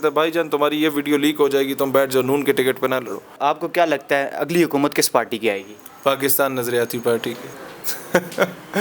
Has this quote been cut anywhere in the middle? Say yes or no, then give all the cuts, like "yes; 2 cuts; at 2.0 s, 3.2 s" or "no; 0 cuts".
yes; 2 cuts; at 3.3 s, 7.5 s